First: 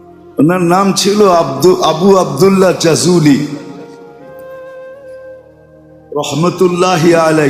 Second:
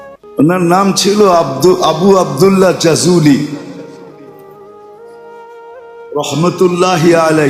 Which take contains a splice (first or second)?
first